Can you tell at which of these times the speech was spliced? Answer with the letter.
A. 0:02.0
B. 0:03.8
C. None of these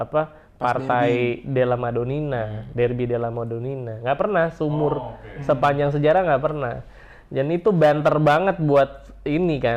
C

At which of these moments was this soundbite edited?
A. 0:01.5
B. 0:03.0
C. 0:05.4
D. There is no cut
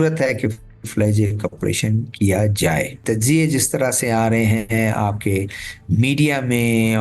B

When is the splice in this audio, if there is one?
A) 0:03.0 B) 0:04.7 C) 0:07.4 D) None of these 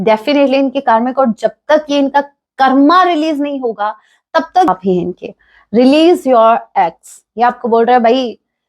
B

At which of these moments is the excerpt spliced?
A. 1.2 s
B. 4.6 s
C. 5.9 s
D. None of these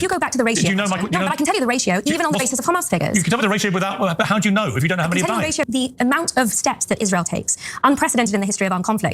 C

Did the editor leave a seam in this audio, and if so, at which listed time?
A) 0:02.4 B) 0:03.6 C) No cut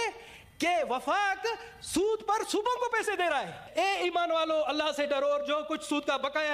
B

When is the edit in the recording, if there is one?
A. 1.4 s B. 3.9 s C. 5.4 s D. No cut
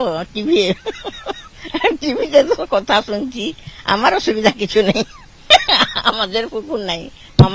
C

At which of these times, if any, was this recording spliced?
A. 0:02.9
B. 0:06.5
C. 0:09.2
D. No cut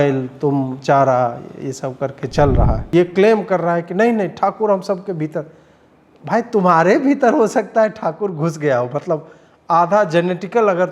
A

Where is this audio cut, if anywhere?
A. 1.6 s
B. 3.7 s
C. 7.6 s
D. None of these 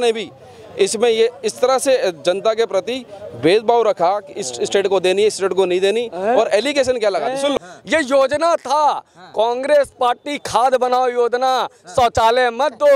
C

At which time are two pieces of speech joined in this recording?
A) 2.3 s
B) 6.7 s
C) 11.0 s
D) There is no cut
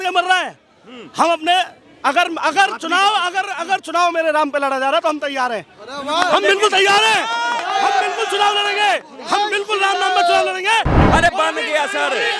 C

